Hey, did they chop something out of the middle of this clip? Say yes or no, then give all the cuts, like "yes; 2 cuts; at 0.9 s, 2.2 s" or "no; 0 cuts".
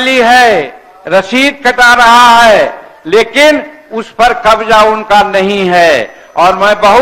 no; 0 cuts